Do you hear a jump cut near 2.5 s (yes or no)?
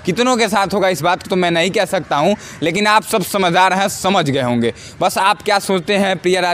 no